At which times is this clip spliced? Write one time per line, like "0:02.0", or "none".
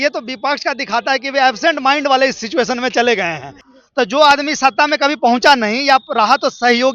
0:03.7